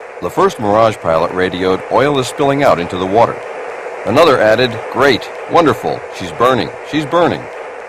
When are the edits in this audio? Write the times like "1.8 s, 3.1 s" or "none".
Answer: 2.9 s